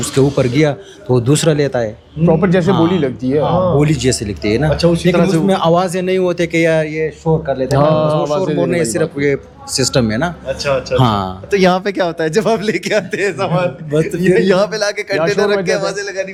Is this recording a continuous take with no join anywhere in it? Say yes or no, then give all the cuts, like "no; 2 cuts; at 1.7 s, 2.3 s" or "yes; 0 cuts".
yes; 0 cuts